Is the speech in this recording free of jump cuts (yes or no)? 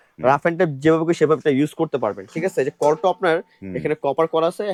yes